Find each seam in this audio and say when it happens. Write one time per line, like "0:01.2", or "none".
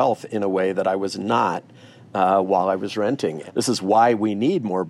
0:03.4